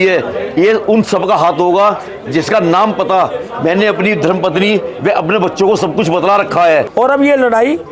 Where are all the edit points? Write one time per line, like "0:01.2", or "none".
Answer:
0:06.9